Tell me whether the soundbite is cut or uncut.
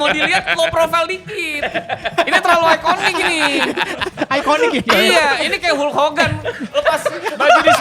uncut